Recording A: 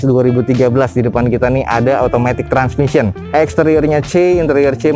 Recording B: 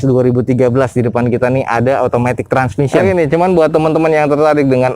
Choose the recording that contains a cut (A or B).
B